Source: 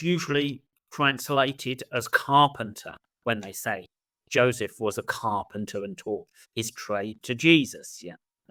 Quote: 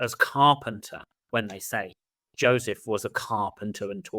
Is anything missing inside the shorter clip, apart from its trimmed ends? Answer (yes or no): no